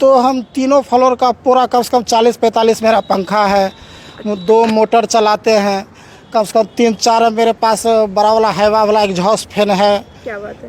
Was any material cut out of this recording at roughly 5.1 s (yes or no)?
no